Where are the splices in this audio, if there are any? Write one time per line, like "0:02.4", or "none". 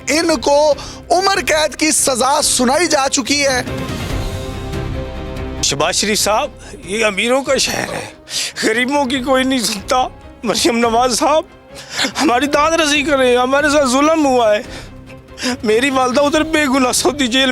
0:05.7